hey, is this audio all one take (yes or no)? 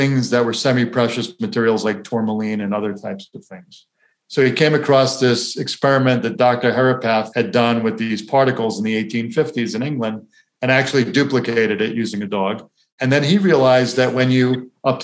yes